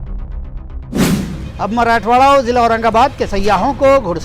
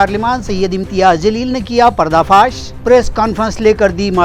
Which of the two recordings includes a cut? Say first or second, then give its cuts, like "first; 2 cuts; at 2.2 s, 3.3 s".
first; 1 cut; at 1.4 s